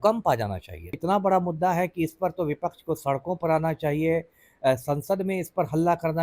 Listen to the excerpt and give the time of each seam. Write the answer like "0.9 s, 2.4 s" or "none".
1.0 s